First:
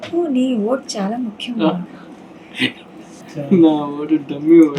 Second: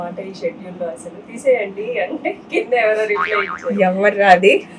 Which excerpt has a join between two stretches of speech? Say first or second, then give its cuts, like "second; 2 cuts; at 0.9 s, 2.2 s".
first; 1 cut; at 3.2 s